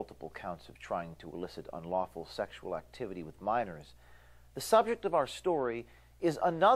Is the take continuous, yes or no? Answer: no